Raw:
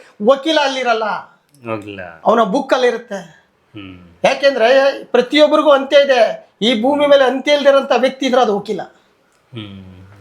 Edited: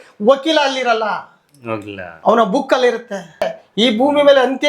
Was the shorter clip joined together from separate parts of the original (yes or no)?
yes